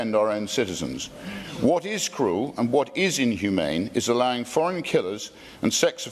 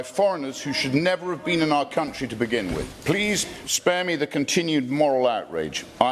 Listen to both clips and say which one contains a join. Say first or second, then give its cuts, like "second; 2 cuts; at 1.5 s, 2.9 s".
second; 1 cut; at 2.9 s